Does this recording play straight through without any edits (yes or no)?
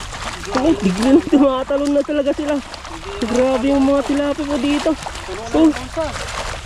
yes